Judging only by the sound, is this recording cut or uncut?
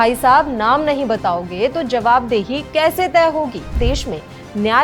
cut